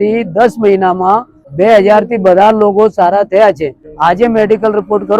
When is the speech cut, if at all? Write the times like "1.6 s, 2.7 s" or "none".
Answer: 1.4 s, 3.8 s

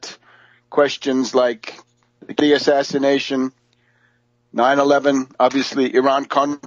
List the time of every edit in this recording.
4.1 s

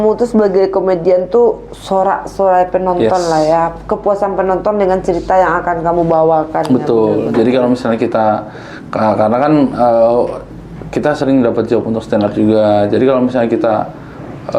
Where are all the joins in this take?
none

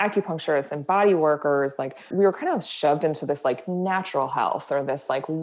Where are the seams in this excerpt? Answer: 2.1 s

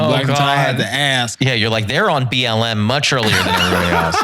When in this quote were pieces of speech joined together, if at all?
1.3 s

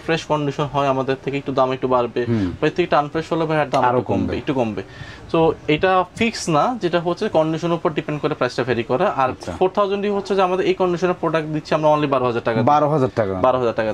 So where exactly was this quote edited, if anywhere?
none

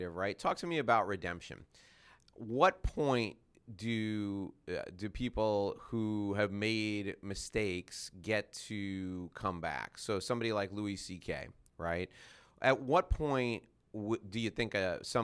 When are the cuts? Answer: none

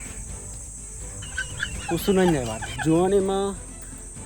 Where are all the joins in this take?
2.6 s

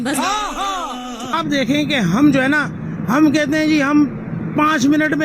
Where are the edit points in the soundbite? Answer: 1.3 s

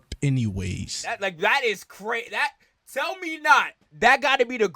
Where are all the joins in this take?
3.8 s

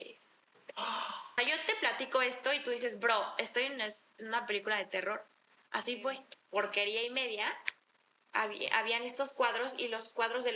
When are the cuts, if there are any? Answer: 1.4 s, 6.3 s

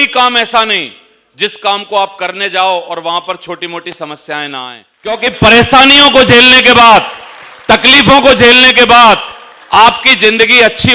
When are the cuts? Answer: 5.2 s

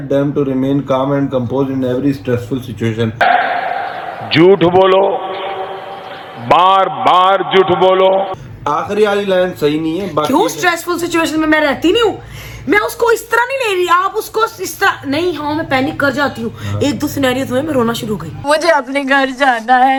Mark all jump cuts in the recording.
none

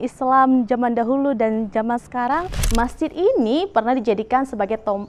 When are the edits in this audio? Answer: 2.6 s

